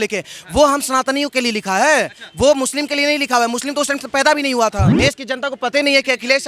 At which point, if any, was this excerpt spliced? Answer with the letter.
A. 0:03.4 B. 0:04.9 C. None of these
B